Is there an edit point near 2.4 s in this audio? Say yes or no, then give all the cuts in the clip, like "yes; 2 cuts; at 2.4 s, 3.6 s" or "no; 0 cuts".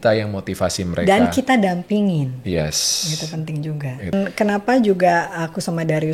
no; 1 cut; at 4.1 s